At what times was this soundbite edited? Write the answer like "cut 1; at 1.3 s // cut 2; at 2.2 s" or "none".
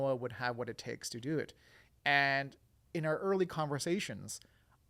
none